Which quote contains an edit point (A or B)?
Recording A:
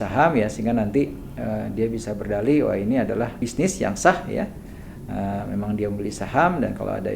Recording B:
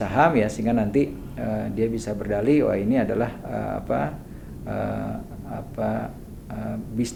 A